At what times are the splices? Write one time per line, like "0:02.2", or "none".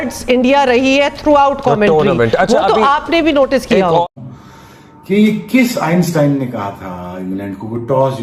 none